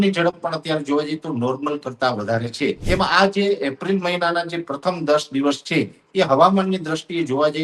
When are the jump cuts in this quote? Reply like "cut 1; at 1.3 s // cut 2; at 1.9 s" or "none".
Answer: cut 1; at 2.8 s